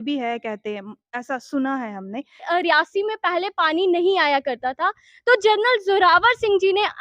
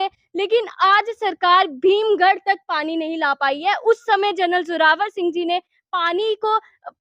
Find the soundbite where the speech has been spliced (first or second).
first